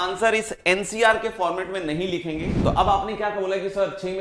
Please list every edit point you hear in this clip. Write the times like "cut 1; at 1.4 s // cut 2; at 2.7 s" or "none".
cut 1; at 2.6 s

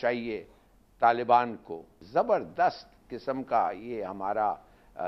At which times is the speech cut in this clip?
cut 1; at 1.9 s

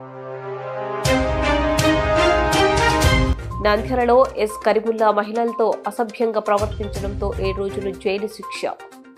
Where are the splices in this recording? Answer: none

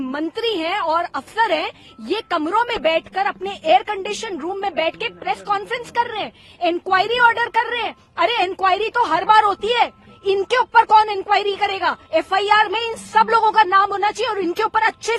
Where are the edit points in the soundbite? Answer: none

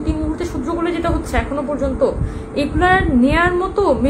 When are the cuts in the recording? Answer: none

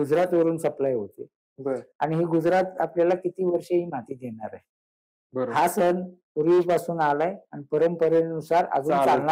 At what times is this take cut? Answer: none

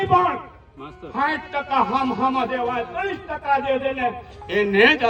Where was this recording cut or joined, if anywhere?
none

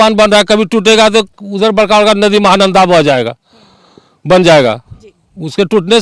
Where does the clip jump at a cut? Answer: none

